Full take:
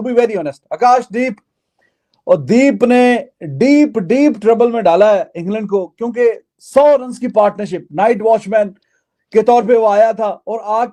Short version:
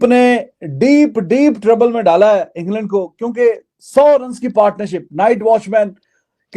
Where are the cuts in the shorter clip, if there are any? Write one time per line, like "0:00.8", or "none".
none